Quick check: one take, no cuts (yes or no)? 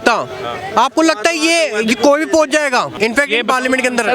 no